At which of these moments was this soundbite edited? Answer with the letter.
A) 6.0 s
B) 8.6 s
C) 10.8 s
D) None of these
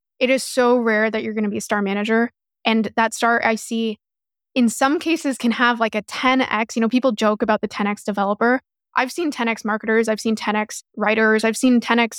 C